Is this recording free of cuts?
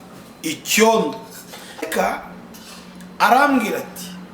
no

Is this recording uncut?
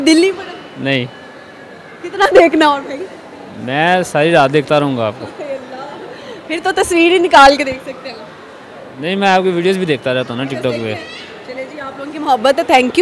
yes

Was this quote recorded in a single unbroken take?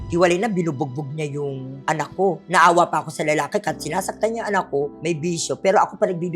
no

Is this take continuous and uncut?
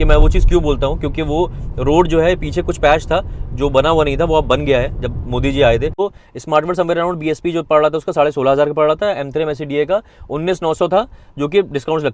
no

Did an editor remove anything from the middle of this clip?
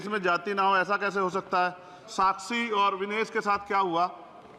yes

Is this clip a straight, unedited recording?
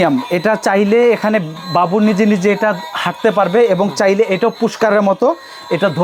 yes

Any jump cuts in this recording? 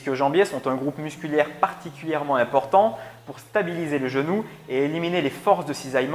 no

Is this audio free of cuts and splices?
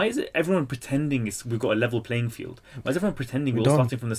yes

